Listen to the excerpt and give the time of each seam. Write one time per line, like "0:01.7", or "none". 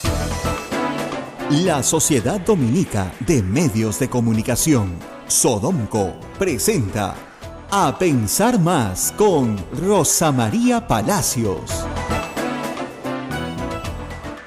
0:01.3

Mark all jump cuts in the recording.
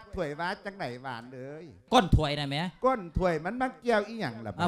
0:01.8

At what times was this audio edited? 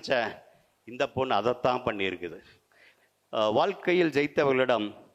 0:02.8

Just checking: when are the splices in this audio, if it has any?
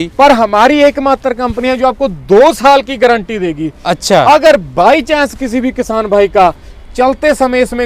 none

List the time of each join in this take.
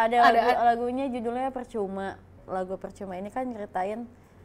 0:02.4

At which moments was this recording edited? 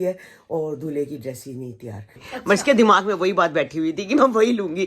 0:02.3

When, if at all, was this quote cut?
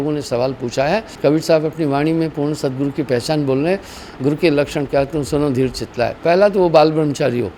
0:01.1

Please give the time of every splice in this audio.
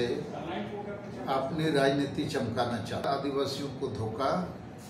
0:03.1

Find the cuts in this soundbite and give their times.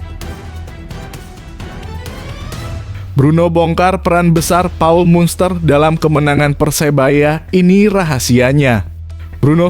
0:03.0

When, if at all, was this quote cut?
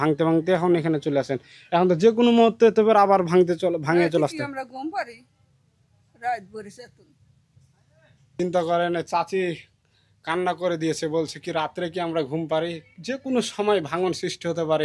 none

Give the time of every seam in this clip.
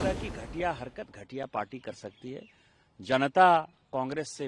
none

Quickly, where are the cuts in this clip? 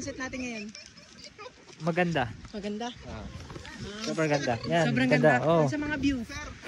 none

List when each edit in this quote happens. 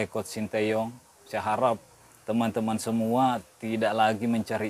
0:01.2

